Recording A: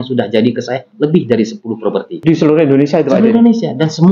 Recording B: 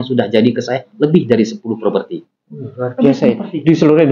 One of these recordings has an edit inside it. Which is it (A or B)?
A